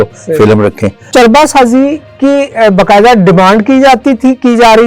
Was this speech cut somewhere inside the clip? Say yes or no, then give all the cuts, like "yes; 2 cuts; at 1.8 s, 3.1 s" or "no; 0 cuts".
yes; 1 cut; at 1.1 s